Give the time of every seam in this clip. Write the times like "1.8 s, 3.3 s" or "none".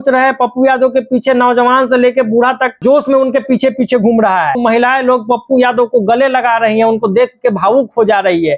2.8 s, 4.6 s